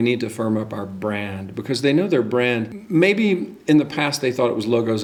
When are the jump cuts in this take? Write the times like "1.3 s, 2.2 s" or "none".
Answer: none